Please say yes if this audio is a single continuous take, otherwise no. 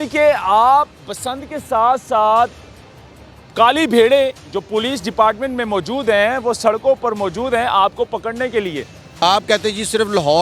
no